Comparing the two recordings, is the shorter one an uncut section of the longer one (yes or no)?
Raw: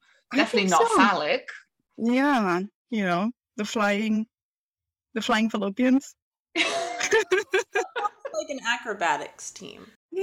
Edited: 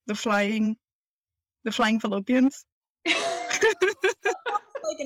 yes